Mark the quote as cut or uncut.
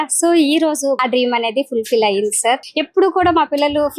cut